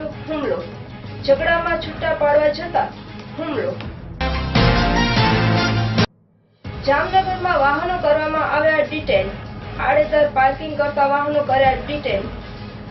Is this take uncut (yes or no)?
yes